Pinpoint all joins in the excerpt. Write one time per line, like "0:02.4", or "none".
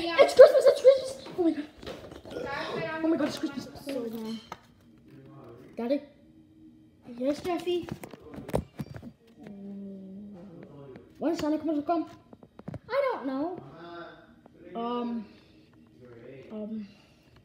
0:03.8

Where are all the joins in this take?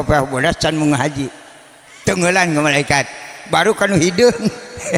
none

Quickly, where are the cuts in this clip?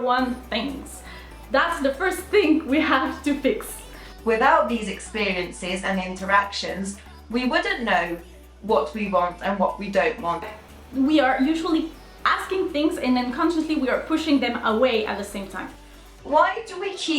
0:04.1
0:10.4
0:15.7

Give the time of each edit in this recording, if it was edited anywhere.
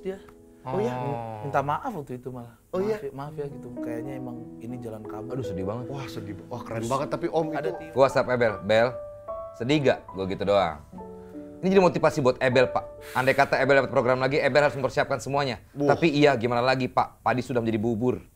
0:07.5

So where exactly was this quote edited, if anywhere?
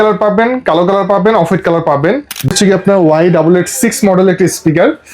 0:02.5

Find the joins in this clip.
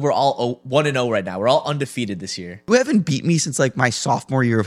0:02.7

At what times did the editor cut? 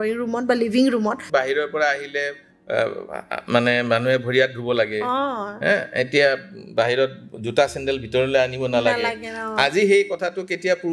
0:01.3

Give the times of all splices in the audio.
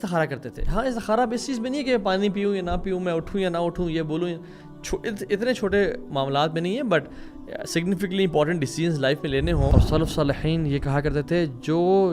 0:09.7

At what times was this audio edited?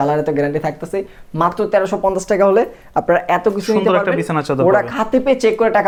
none

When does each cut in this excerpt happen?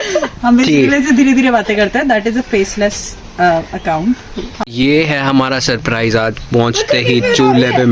0:04.5

